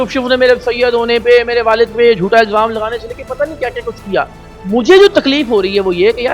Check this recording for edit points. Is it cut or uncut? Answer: uncut